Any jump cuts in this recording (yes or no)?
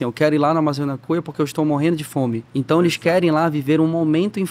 yes